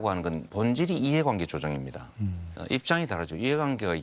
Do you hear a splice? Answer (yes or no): no